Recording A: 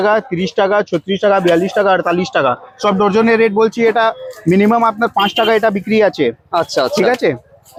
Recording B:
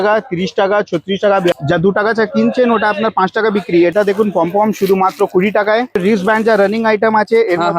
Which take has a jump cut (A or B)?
B